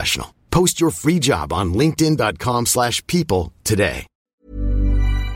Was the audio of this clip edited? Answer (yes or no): yes